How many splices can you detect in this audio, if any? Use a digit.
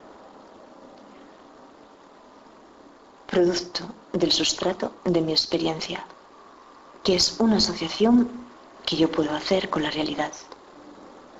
1